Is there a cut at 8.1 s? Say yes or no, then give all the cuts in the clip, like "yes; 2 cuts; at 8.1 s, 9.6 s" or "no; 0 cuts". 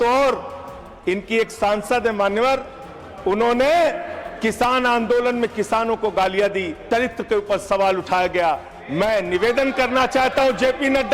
no; 1 cut; at 6.8 s